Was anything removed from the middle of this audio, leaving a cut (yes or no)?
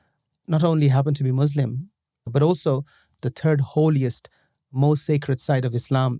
yes